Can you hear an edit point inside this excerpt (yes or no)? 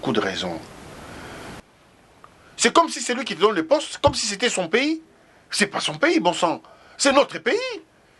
yes